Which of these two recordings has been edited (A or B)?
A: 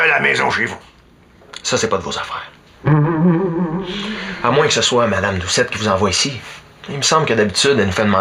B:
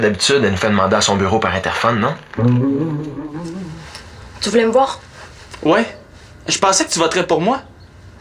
B